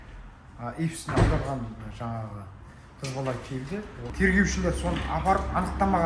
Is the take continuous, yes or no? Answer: no